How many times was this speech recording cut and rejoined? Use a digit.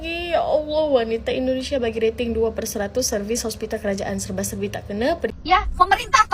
1